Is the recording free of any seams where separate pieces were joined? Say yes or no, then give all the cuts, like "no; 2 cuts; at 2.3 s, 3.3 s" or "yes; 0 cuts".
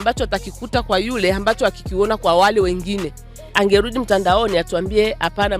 no; 1 cut; at 3.6 s